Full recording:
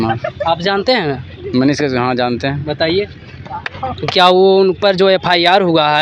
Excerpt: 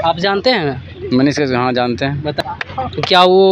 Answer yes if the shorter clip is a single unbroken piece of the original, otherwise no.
no